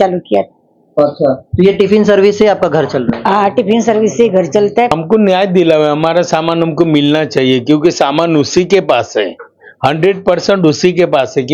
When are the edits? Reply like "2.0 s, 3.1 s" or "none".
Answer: 4.9 s